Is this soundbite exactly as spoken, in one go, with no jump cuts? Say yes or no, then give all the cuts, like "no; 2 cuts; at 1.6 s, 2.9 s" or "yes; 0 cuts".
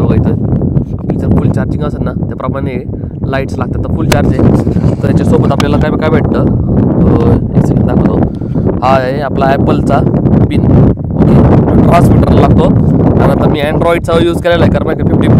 yes; 0 cuts